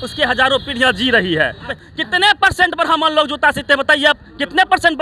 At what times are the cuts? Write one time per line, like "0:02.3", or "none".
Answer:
0:01.7